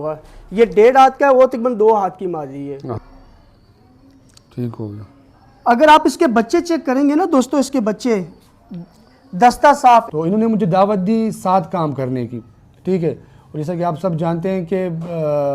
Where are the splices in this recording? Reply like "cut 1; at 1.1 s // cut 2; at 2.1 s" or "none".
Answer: cut 1; at 3.0 s // cut 2; at 10.1 s